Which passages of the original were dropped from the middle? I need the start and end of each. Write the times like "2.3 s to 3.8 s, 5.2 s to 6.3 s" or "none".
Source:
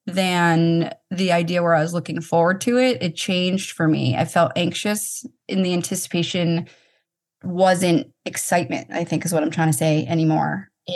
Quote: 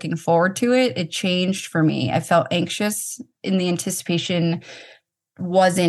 none